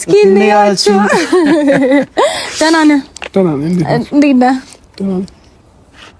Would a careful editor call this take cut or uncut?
uncut